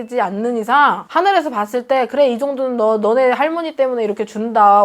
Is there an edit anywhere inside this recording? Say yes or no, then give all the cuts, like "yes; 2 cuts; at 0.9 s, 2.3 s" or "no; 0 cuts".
yes; 1 cut; at 1.0 s